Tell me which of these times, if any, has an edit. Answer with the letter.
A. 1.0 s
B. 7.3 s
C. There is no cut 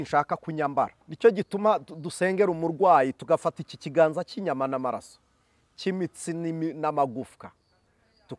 A